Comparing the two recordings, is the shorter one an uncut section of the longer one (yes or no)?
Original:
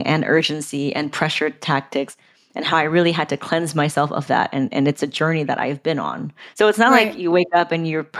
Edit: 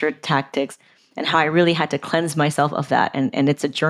yes